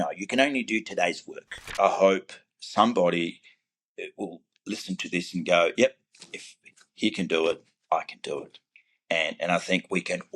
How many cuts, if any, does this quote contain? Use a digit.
1